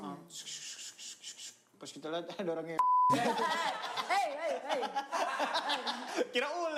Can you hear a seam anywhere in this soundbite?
no; 0 cuts

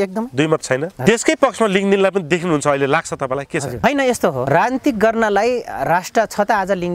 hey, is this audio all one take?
no; 3 cuts; at 1.0 s, 3.8 s, 4.4 s

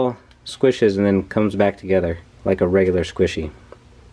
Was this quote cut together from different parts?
yes; 1 cut; at 2.3 s

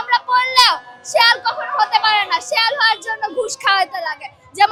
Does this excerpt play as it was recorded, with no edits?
yes; 0 cuts

